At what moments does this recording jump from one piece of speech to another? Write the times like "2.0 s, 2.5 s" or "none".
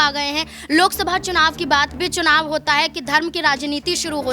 1.9 s